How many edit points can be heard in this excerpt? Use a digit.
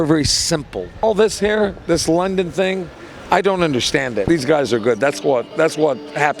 2